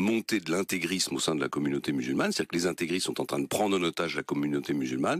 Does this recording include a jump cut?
yes; 1 cut; at 1.8 s

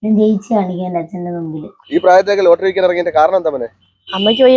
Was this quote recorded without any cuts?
no; 1 cut; at 1.8 s

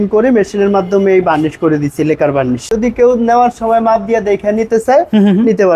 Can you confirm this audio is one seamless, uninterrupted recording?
no; 1 cut; at 2.7 s

